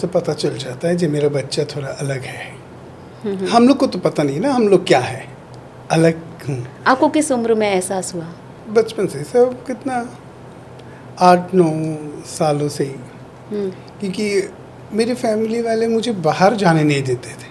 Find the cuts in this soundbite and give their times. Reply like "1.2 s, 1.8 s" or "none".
none